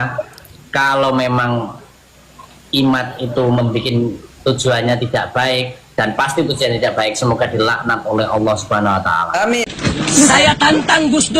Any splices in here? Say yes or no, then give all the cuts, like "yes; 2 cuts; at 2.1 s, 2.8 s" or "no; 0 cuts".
yes; 1 cut; at 9.6 s